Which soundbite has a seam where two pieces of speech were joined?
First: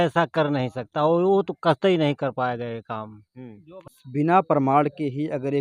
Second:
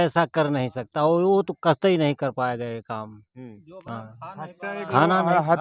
first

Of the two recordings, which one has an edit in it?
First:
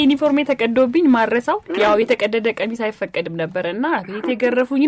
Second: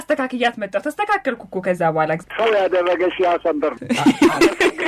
second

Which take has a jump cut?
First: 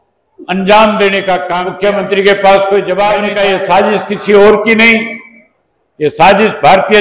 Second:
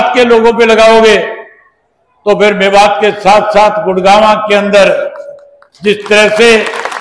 first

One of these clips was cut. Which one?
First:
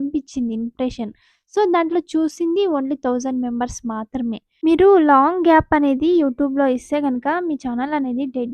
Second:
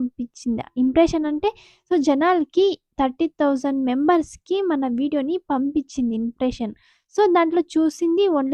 first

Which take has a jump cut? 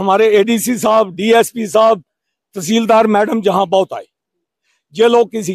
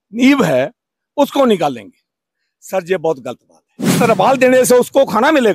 second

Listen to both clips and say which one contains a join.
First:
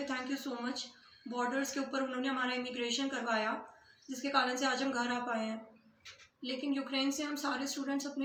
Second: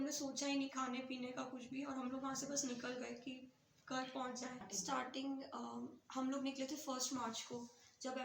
second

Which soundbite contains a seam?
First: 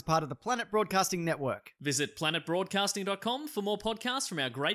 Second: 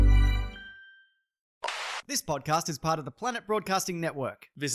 second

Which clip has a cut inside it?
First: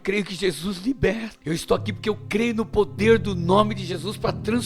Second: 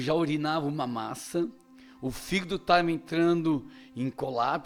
first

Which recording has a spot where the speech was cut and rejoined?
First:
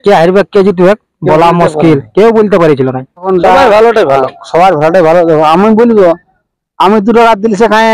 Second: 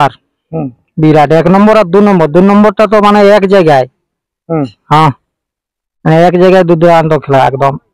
first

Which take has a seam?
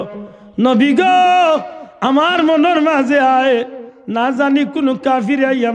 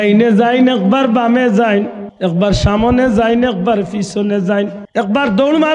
second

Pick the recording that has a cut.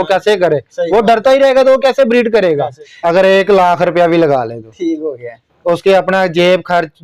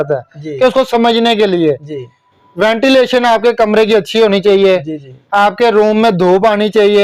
first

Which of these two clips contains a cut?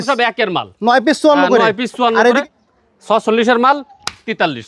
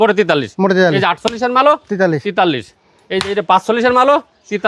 first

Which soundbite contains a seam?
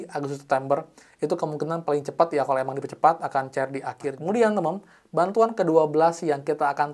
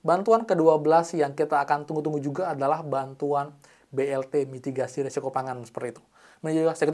first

